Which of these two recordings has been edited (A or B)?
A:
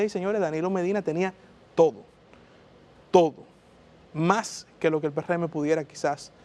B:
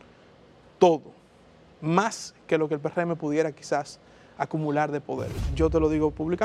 B